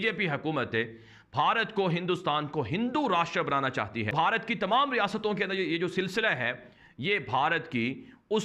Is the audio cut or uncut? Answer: uncut